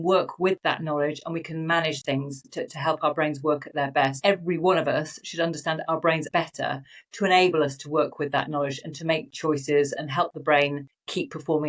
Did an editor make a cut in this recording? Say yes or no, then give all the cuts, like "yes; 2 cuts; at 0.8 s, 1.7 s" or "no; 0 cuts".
yes; 2 cuts; at 4.2 s, 6.3 s